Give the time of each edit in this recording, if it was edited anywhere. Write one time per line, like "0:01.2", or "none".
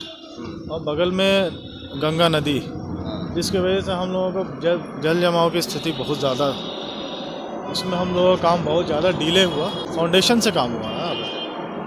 0:10.0